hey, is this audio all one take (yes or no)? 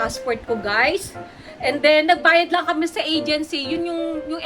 yes